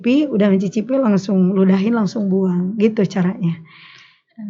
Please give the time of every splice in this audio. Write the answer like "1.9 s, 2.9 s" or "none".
none